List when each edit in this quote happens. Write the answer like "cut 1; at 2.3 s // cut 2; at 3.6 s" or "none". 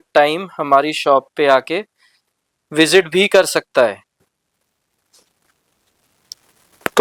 none